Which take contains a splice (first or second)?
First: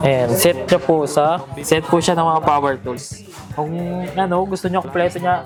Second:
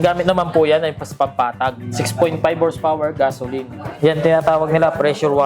second